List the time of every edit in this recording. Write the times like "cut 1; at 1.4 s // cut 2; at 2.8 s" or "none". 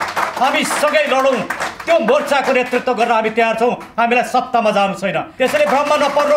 cut 1; at 5.3 s